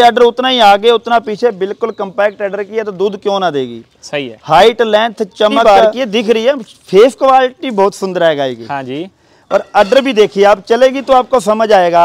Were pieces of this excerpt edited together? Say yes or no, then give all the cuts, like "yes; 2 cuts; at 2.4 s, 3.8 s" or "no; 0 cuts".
yes; 1 cut; at 5.6 s